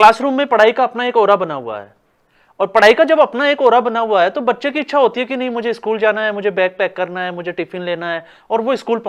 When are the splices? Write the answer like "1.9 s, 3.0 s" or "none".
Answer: none